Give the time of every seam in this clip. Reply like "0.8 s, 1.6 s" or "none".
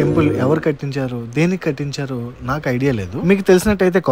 none